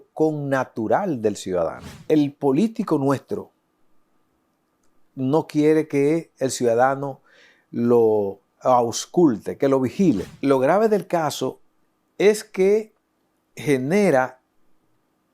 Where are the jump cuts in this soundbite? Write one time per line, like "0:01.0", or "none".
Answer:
0:01.9
0:10.3